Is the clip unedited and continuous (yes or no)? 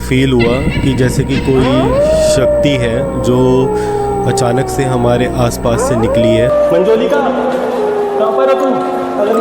no